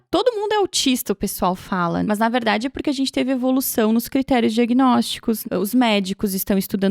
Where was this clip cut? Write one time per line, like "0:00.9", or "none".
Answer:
0:02.0
0:05.4